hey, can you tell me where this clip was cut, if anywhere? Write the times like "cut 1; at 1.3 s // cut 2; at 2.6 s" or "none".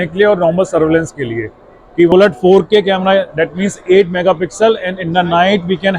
cut 1; at 2.1 s